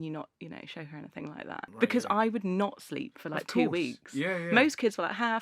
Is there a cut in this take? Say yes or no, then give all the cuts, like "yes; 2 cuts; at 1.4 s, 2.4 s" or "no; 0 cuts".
yes; 1 cut; at 1.7 s